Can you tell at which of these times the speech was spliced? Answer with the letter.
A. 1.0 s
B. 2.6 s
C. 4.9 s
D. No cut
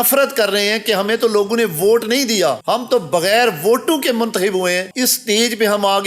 C